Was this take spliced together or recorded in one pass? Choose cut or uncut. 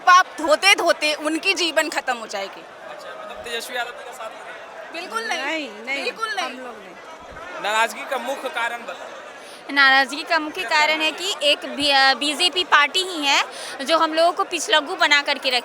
uncut